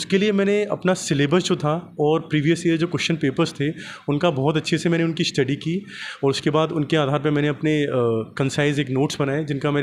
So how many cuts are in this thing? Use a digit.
0